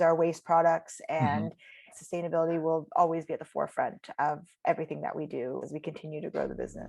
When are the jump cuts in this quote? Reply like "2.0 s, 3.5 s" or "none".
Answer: 1.9 s, 5.6 s